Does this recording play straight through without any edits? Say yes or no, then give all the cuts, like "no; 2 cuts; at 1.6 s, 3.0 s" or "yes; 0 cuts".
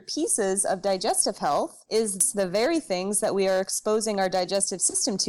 no; 1 cut; at 2.2 s